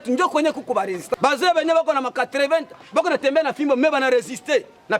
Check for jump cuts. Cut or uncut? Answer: cut